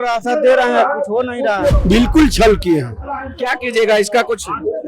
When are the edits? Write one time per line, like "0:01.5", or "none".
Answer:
0:01.8